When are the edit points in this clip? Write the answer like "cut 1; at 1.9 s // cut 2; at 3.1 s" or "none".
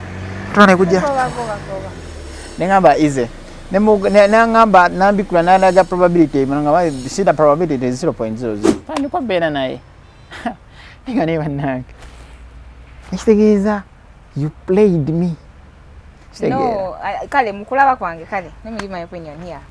cut 1; at 8.6 s